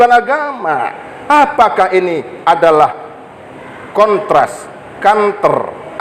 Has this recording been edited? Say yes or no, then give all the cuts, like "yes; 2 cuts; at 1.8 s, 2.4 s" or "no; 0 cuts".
no; 0 cuts